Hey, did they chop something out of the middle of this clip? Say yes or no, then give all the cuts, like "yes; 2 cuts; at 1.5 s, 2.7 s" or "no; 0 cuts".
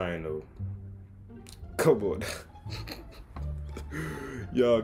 no; 0 cuts